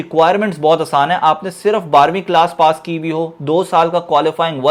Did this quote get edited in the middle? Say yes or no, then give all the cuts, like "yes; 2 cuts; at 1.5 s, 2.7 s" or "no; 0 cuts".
no; 0 cuts